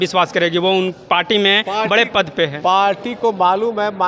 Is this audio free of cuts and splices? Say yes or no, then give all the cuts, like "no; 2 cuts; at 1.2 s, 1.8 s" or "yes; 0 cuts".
yes; 0 cuts